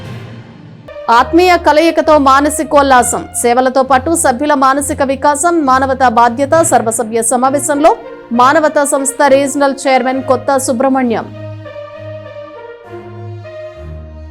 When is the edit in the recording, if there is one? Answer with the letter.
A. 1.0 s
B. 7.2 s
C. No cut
A